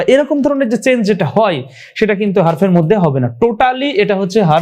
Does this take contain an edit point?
no; 0 cuts

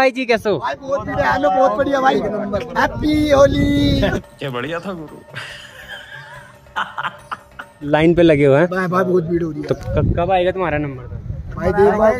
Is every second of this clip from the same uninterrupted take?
yes; 0 cuts

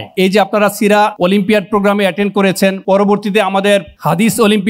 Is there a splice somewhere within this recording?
no; 0 cuts

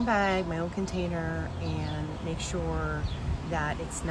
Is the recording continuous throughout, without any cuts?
yes; 0 cuts

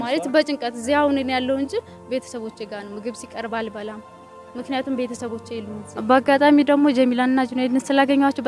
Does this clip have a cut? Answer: yes; 1 cut; at 5.9 s

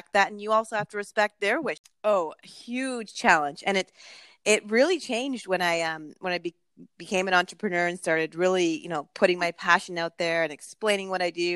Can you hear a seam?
yes; 1 cut; at 1.8 s

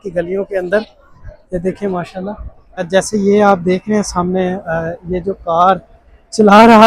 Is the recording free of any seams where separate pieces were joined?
no; 1 cut; at 2.9 s

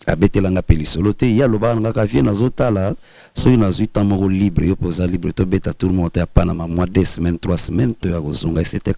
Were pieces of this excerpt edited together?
no; 0 cuts

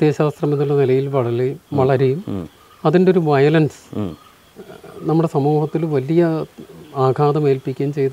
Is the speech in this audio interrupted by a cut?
no; 0 cuts

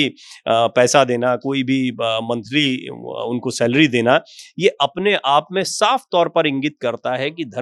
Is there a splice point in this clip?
no; 0 cuts

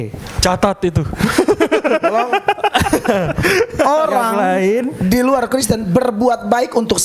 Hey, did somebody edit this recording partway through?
no; 0 cuts

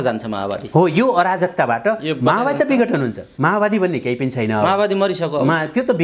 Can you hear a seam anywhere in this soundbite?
yes; 1 cut; at 3.2 s

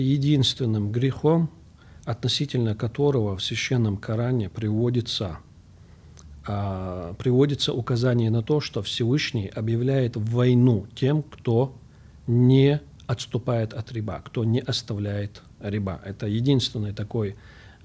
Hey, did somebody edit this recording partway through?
no; 0 cuts

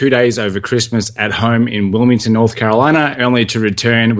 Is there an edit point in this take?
no; 0 cuts

